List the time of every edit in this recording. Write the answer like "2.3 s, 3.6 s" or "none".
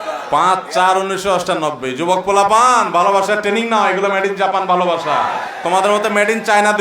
5.4 s